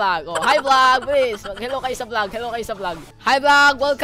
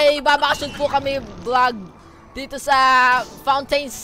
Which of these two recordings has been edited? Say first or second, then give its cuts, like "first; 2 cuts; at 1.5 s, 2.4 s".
first; 1 cut; at 3.1 s